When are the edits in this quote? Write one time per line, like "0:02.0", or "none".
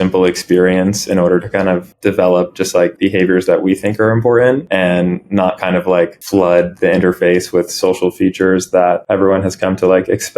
0:01.9
0:02.9
0:04.6
0:06.2
0:09.0